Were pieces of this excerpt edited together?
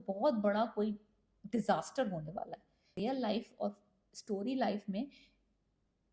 yes; 1 cut; at 2.9 s

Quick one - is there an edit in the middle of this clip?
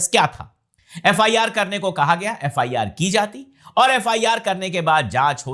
no; 0 cuts

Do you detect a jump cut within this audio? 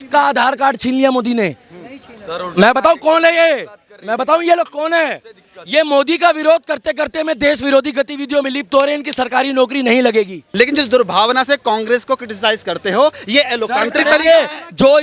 yes; 1 cut; at 10.4 s

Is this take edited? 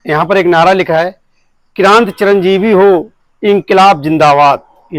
no; 0 cuts

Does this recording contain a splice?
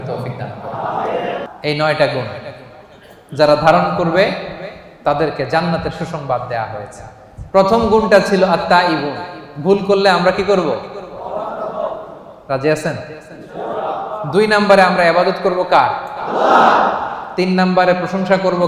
yes; 1 cut; at 1.3 s

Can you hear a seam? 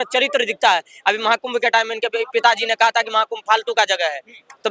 no; 0 cuts

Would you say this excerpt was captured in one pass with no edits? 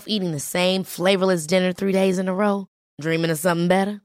yes; 0 cuts

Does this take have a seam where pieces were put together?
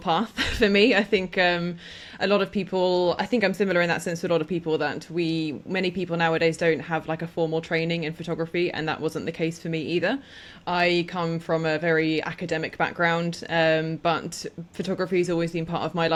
no; 0 cuts

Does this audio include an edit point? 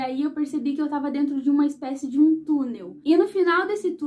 no; 0 cuts

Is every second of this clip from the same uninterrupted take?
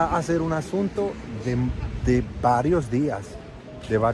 yes; 0 cuts

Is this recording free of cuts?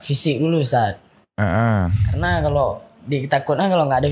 yes; 0 cuts

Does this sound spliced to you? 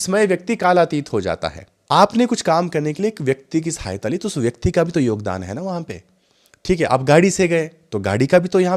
yes; 1 cut; at 1.7 s

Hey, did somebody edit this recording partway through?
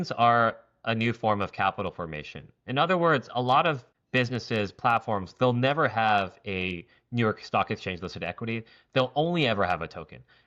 yes; 1 cut; at 3.9 s

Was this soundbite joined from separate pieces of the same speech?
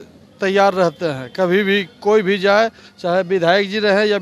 no; 0 cuts

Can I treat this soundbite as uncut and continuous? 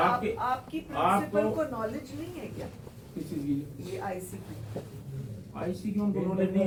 yes; 0 cuts

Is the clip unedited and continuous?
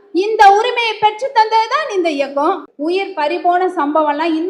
no; 1 cut; at 2.7 s

